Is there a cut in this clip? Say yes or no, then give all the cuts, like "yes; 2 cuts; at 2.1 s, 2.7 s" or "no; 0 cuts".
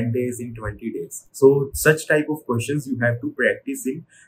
yes; 1 cut; at 1.2 s